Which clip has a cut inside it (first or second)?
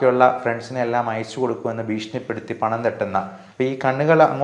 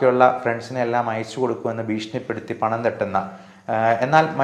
first